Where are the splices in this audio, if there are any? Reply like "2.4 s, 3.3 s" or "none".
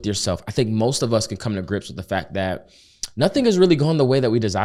none